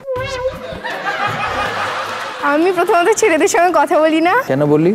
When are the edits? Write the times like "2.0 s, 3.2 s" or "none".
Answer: 2.4 s